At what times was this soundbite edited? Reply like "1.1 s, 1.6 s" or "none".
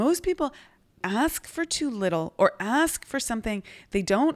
1.0 s